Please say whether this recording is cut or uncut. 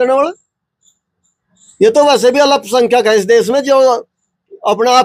uncut